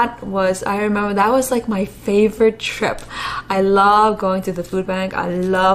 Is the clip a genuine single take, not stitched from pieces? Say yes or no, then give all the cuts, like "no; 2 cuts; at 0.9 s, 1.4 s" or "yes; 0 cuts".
yes; 0 cuts